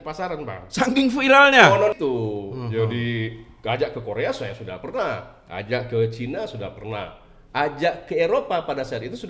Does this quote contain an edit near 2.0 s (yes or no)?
yes